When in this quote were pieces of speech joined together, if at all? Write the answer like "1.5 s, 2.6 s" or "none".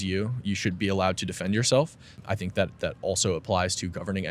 2.2 s